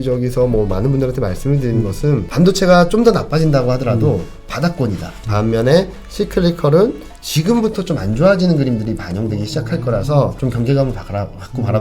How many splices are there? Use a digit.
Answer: 3